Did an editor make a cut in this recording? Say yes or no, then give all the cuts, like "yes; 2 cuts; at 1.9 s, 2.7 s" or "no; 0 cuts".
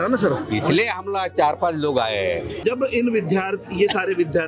yes; 1 cut; at 2.6 s